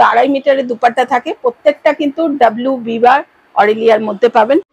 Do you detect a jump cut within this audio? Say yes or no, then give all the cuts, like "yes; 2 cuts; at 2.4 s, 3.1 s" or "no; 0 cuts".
no; 0 cuts